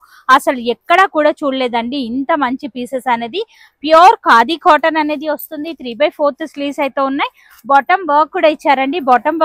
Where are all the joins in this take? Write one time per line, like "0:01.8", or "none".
none